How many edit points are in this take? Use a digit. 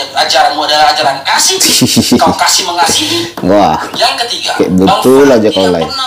0